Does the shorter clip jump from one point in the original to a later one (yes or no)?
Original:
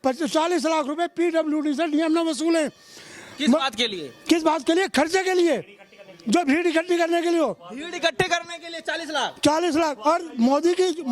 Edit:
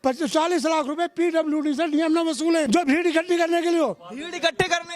yes